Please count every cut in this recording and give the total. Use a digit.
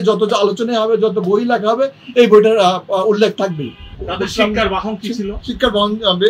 1